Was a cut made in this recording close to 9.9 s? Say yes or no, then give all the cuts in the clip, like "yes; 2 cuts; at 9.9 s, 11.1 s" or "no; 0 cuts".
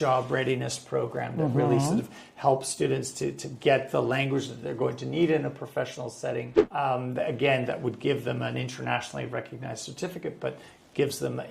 no; 1 cut; at 6.6 s